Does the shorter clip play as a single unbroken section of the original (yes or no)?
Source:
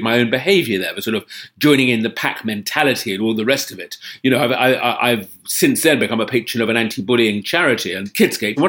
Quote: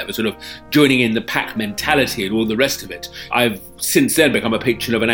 no